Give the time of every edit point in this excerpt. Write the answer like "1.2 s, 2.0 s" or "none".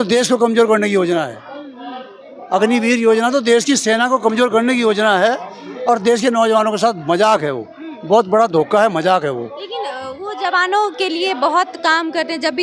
none

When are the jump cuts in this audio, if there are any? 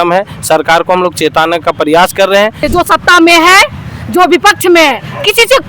2.6 s

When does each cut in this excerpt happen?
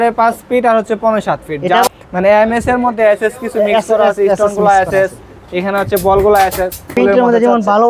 1.9 s, 6.9 s

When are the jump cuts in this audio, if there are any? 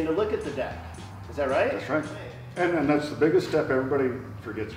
2.4 s

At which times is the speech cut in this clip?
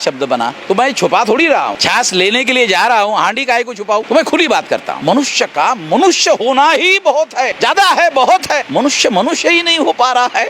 1.8 s, 4.0 s, 4.9 s, 7.5 s, 8.6 s

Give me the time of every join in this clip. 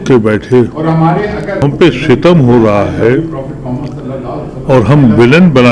1.6 s

